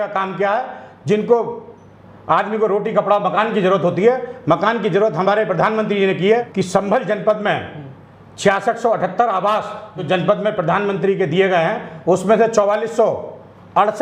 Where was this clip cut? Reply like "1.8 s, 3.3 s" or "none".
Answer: 6.5 s, 10.0 s